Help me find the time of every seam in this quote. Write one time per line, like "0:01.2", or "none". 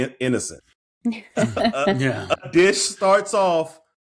none